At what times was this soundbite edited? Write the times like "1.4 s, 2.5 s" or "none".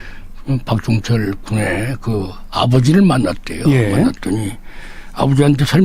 2.3 s